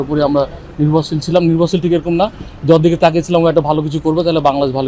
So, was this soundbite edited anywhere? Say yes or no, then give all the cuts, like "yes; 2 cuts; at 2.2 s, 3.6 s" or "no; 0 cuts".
no; 0 cuts